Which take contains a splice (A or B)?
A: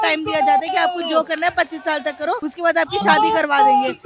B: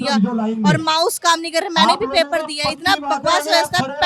A